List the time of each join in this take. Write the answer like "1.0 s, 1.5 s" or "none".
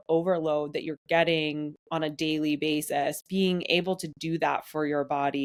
none